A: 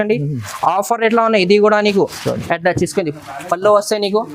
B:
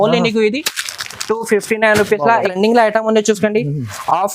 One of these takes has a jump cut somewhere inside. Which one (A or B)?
B